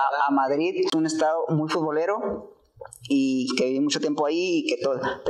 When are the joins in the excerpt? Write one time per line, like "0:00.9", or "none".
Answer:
0:00.9